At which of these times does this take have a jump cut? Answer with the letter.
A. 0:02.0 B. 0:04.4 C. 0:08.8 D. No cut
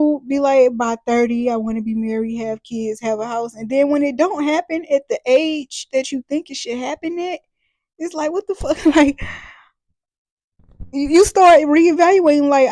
D